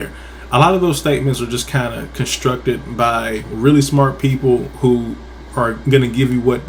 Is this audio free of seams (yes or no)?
yes